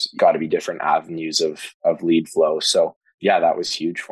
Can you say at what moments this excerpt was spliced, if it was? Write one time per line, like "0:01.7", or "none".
0:03.1